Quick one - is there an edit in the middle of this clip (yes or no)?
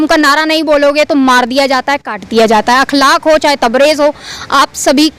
no